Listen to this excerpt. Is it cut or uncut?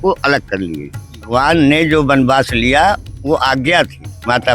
cut